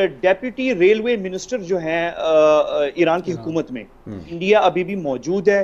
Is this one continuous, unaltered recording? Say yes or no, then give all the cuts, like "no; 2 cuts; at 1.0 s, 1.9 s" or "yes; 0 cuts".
no; 1 cut; at 4.3 s